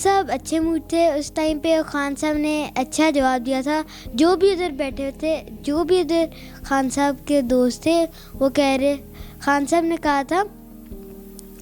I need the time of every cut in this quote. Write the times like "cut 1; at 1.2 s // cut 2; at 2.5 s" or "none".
none